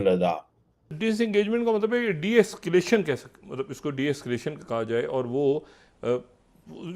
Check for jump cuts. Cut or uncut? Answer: cut